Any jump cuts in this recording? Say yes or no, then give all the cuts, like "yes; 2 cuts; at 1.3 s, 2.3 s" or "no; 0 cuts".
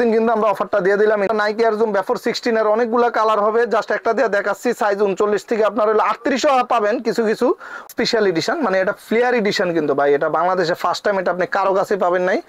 yes; 2 cuts; at 1.3 s, 7.8 s